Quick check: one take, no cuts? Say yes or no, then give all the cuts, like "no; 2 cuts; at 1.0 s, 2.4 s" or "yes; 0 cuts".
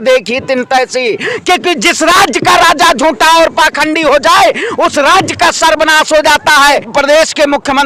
no; 2 cuts; at 1.3 s, 6.9 s